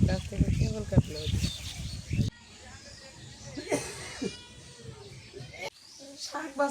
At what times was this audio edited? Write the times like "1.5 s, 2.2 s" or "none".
2.3 s, 5.7 s